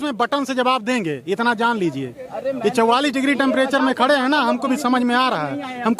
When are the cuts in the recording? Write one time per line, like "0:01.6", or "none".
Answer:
none